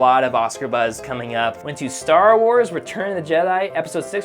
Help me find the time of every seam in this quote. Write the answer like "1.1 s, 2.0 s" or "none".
1.7 s